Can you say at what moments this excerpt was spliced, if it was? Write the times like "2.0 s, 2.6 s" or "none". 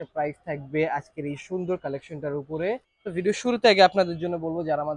2.9 s